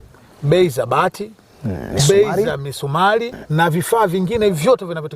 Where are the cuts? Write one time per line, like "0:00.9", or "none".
0:03.3